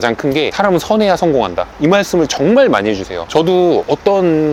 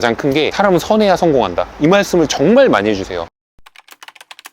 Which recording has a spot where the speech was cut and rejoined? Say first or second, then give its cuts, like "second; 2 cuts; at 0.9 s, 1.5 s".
second; 1 cut; at 3.1 s